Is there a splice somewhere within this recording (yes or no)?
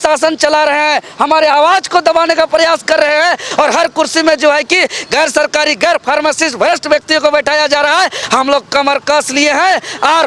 no